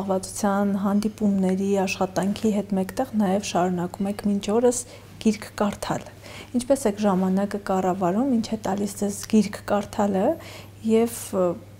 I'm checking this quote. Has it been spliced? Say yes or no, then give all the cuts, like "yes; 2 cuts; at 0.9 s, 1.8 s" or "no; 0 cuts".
no; 0 cuts